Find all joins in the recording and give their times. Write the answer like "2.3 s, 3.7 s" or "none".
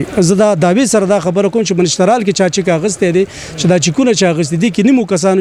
none